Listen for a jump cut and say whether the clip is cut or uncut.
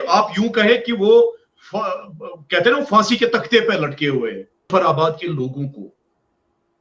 cut